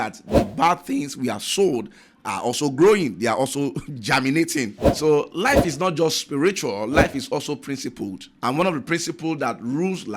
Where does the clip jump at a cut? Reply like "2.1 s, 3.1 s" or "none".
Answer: 8.3 s